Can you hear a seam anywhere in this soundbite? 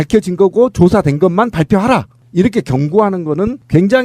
yes; 1 cut; at 1.0 s

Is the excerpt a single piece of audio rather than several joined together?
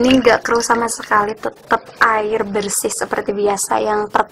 yes; 0 cuts

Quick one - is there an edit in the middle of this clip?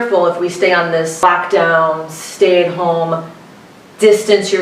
yes; 1 cut; at 1.2 s

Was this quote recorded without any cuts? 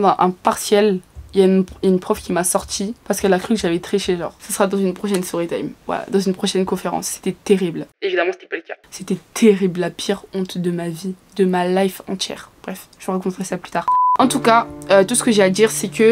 yes; 0 cuts

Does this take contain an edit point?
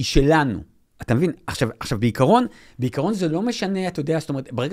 no; 0 cuts

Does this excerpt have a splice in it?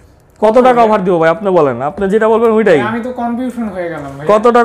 no; 0 cuts

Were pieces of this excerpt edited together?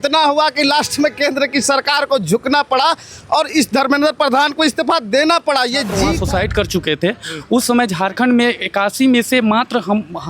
yes; 1 cut; at 6.1 s

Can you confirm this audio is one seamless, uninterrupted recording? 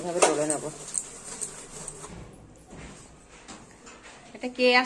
no; 1 cut; at 2.1 s

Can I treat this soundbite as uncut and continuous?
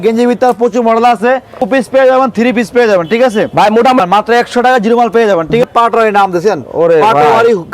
no; 3 cuts; at 1.6 s, 4.0 s, 5.6 s

